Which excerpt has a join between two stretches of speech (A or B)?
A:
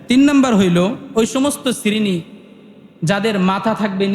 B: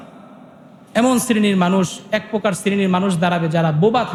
A